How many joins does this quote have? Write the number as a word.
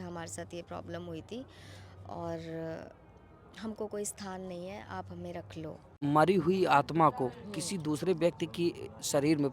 one